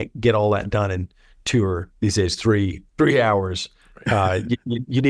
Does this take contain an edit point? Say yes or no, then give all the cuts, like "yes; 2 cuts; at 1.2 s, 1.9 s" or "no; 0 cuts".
yes; 2 cuts; at 1.9 s, 2.8 s